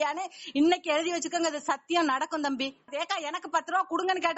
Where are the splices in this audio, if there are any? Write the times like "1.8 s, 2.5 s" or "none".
2.9 s